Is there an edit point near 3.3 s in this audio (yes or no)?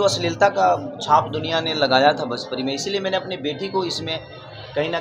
no